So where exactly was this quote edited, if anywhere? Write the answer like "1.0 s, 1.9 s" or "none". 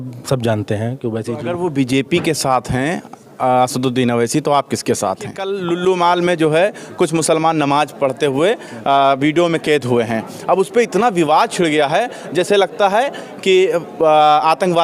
1.3 s, 5.5 s